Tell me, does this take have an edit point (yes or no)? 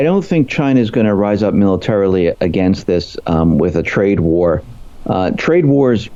no